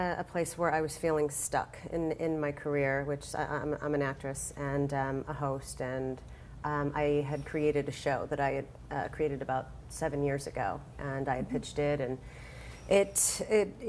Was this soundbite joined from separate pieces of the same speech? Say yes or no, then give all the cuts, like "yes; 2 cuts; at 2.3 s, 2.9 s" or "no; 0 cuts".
no; 0 cuts